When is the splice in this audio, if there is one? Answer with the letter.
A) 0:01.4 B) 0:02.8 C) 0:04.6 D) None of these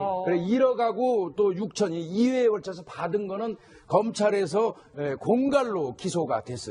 C